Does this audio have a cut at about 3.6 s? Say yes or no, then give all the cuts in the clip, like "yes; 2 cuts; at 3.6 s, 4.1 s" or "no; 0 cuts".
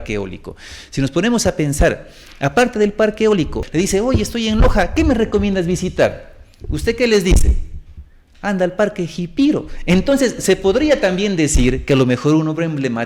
yes; 1 cut; at 3.6 s